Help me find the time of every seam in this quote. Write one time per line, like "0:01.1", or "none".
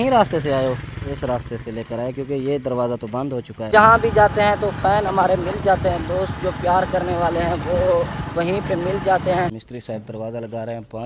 0:03.6
0:09.6